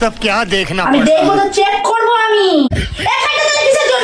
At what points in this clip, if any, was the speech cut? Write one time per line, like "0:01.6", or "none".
0:02.7